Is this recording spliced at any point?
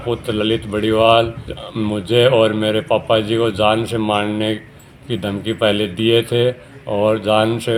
no; 0 cuts

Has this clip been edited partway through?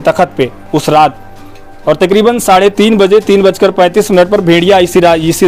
no; 0 cuts

